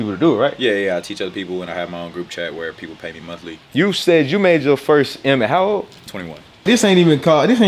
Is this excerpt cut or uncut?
cut